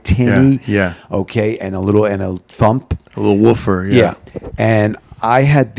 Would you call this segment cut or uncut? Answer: uncut